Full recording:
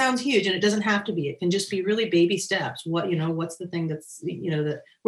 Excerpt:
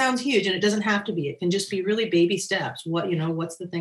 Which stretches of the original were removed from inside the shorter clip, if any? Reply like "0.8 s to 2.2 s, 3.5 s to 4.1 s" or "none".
none